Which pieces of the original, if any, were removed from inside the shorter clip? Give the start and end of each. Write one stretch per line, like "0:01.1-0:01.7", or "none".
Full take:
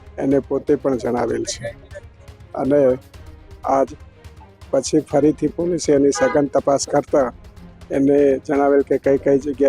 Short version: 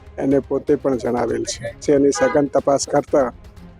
0:01.8-0:05.8